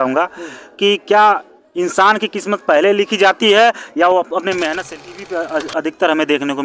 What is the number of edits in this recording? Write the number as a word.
one